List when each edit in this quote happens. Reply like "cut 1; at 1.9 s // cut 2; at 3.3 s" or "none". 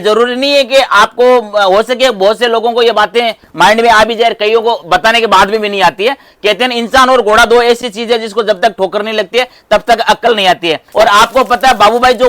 cut 1; at 10.8 s